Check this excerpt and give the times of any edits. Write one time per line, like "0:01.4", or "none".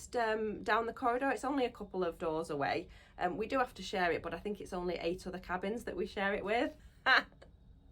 0:02.2
0:06.9